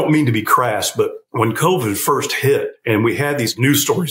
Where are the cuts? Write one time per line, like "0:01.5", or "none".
0:01.2
0:03.2